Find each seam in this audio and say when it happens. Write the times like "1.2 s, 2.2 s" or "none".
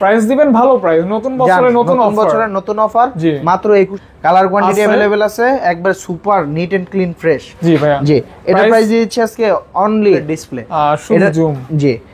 4.0 s, 10.3 s